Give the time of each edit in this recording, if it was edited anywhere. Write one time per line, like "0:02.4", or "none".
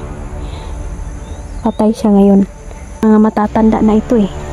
0:03.0